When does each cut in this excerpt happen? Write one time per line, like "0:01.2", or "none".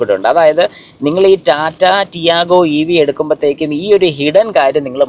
none